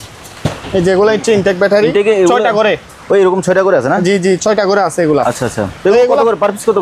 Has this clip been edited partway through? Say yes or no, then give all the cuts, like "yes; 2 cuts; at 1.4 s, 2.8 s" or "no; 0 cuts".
no; 0 cuts